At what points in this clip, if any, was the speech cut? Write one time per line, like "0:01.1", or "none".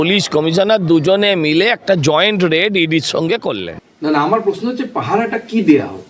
0:03.8